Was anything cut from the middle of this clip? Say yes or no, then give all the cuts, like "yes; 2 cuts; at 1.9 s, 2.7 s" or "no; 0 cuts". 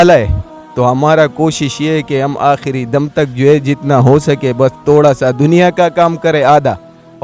no; 0 cuts